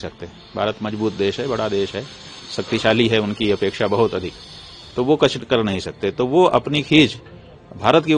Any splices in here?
no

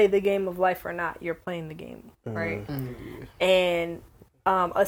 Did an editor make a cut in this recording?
no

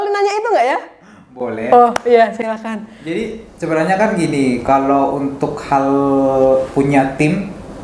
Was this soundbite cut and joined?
no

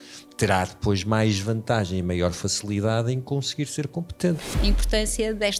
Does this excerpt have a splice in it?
yes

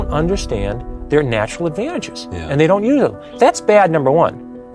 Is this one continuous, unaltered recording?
no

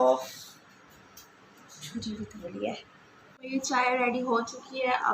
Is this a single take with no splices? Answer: no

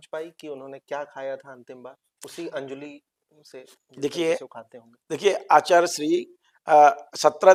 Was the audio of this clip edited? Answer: no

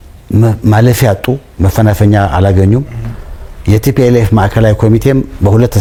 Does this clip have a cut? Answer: no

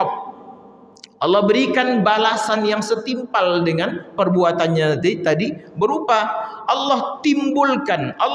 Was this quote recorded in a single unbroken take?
yes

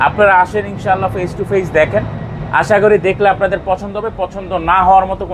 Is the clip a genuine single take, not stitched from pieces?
yes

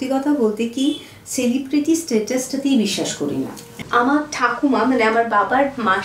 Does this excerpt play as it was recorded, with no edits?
no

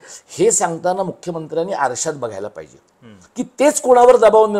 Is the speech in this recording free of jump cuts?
yes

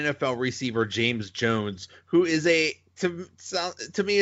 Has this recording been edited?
no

